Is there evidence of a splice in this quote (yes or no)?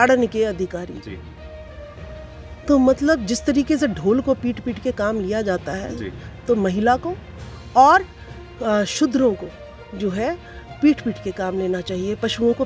no